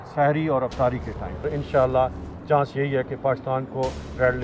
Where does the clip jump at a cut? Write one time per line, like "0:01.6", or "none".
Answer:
0:01.4